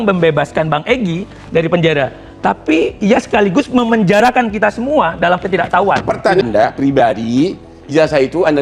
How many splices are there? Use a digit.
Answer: 1